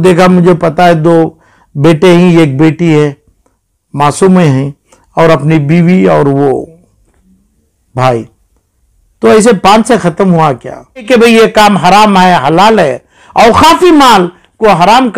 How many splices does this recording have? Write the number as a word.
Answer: one